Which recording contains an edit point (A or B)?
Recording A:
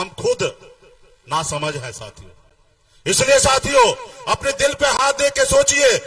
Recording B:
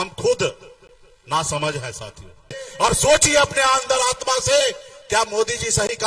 B